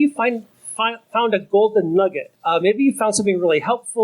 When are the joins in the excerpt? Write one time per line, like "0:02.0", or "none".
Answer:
0:02.3